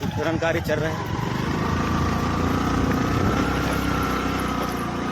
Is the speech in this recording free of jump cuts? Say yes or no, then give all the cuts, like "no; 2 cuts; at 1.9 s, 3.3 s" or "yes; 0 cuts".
no; 1 cut; at 3.5 s